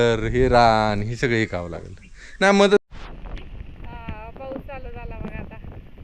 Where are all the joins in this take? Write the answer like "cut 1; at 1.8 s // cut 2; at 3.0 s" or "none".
cut 1; at 2.8 s